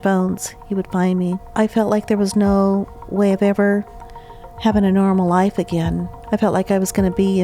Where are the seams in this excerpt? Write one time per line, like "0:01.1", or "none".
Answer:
0:01.4
0:06.1